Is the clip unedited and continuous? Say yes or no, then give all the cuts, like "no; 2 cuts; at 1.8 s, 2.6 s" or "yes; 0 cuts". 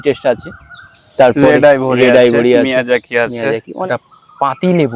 no; 1 cut; at 3.7 s